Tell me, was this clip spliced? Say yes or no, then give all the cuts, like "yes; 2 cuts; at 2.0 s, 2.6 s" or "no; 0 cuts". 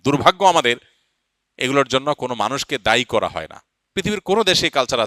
no; 0 cuts